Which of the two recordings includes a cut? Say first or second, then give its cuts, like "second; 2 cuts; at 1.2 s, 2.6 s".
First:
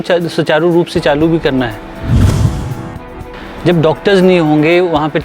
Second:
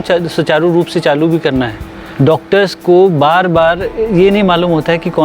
second; 1 cut; at 2.0 s